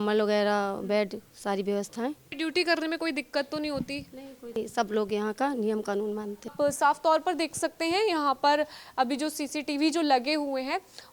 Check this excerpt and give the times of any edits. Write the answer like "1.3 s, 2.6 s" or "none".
2.3 s, 4.6 s, 6.5 s